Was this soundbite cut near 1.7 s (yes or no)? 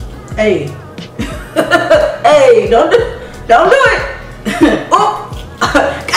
no